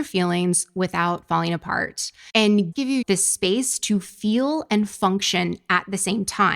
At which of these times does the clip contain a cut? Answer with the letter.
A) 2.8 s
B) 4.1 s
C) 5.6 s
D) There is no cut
A